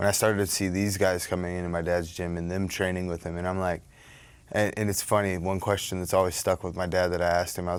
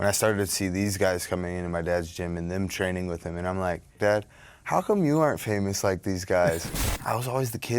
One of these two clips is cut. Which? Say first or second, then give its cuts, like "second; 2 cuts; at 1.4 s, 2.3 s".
second; 2 cuts; at 4.0 s, 6.7 s